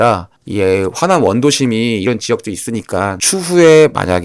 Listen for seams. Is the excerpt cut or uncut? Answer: cut